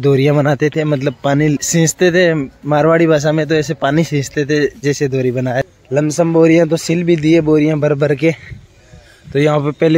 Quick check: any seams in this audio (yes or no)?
yes